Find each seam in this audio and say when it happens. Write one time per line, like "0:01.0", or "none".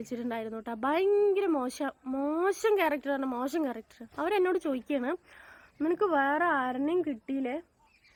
none

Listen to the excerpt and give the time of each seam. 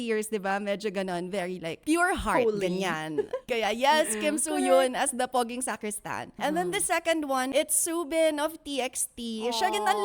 0:01.8
0:03.4
0:05.3
0:06.3
0:07.5

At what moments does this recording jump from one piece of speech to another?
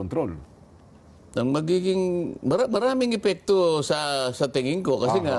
none

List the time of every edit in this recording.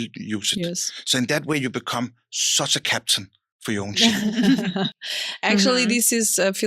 none

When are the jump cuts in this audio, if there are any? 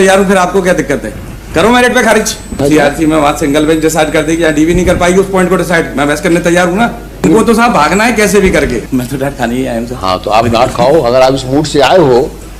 0:02.6
0:07.2
0:08.8

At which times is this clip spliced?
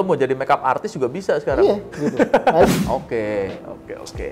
0:02.7

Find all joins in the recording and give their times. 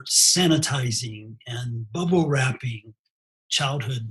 none

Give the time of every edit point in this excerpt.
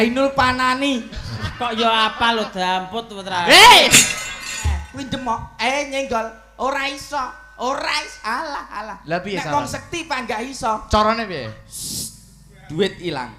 0:04.9

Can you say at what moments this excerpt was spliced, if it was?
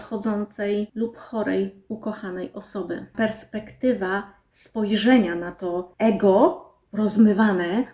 0:00.9
0:03.1
0:05.9

